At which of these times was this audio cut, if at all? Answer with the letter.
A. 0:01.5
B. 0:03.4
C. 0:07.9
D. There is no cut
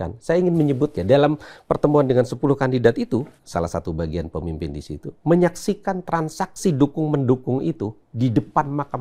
B